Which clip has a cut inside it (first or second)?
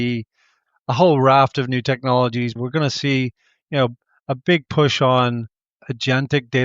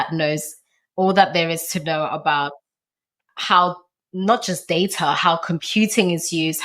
first